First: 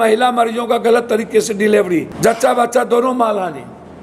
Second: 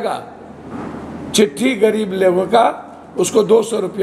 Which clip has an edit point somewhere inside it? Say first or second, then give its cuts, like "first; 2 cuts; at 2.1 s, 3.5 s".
first; 1 cut; at 2.1 s